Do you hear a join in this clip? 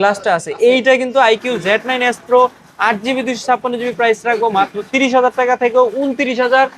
no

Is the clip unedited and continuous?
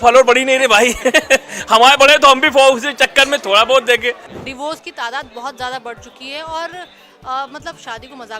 no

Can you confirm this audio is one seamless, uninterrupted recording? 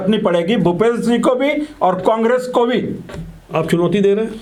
yes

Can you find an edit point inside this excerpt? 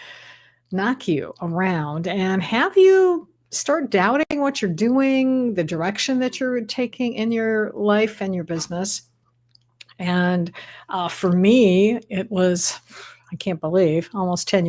no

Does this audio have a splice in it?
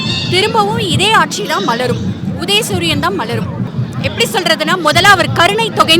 yes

